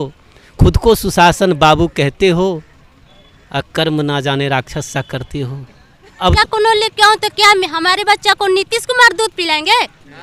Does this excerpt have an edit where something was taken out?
yes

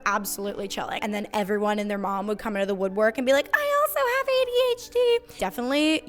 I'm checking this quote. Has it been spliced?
yes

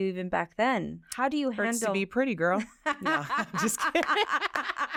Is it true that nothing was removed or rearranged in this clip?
yes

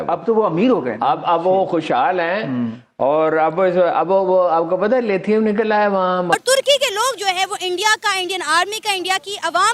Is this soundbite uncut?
no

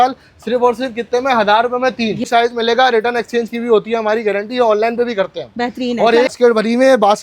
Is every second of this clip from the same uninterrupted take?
no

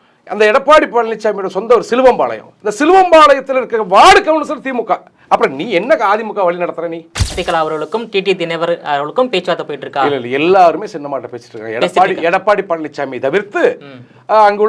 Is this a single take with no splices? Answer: no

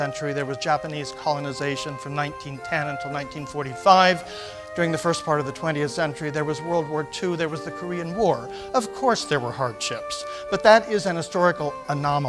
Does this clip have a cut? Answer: no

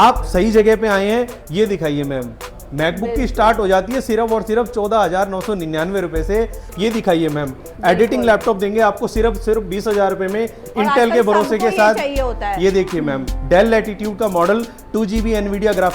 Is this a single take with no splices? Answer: no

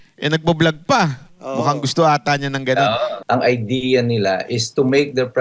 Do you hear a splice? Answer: yes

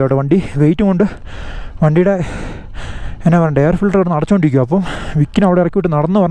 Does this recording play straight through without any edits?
yes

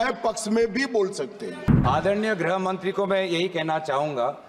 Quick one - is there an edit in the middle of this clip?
yes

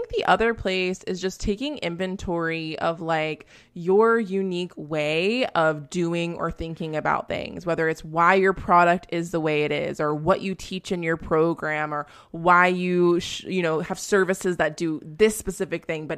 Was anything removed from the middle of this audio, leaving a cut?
no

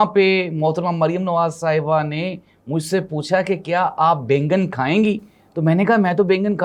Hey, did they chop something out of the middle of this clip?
no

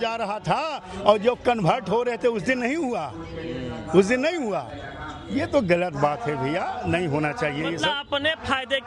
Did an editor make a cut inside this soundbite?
no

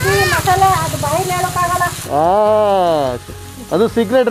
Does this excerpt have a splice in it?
no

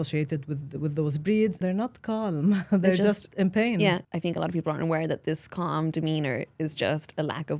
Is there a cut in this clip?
yes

